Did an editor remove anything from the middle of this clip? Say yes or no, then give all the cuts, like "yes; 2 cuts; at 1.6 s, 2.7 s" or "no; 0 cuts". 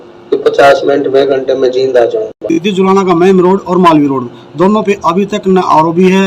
yes; 1 cut; at 2.5 s